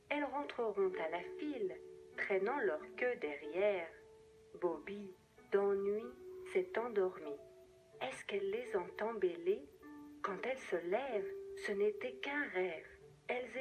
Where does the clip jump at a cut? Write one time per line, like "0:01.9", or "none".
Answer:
0:05.8